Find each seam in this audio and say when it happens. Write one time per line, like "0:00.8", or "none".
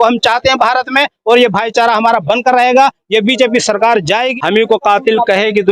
0:04.3